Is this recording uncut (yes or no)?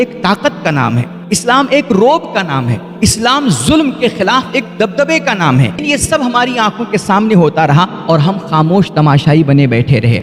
no